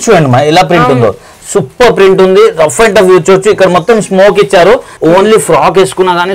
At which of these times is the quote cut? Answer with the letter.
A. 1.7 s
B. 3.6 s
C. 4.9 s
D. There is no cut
C